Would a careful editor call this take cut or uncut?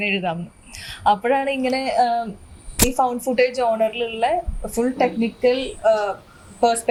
uncut